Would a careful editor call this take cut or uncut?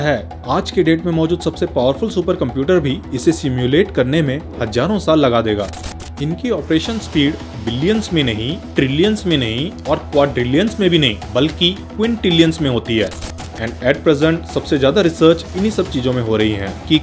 cut